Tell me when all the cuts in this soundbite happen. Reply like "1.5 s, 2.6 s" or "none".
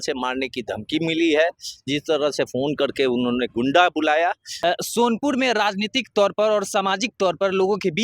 4.5 s